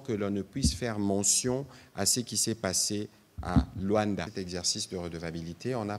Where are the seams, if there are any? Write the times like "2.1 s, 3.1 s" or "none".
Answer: 4.3 s